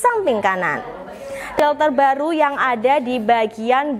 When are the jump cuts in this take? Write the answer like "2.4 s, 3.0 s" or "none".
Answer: 1.6 s